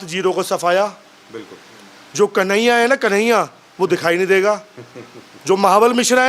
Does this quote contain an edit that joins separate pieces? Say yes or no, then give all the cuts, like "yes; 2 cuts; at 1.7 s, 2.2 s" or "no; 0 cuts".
no; 0 cuts